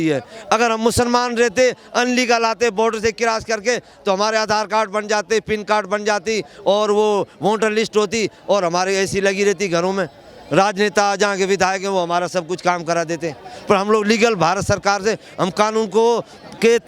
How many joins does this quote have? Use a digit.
0